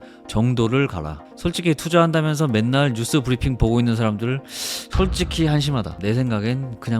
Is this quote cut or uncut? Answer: cut